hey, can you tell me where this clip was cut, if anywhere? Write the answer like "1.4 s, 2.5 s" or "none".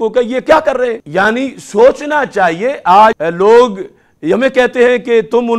1.0 s, 3.2 s